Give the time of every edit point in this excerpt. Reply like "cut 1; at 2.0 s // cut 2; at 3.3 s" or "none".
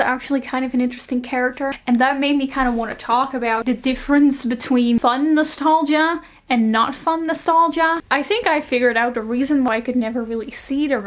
cut 1; at 1.8 s // cut 2; at 3.6 s // cut 3; at 5.0 s // cut 4; at 8.0 s // cut 5; at 9.7 s